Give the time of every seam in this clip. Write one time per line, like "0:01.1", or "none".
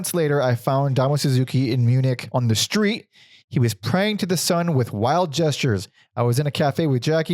0:02.2